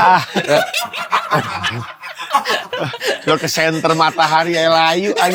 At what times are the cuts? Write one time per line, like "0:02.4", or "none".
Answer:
none